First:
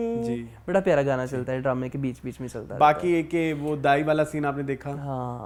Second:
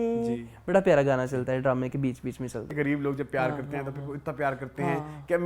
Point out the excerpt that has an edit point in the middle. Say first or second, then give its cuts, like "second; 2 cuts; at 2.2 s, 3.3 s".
second; 1 cut; at 2.7 s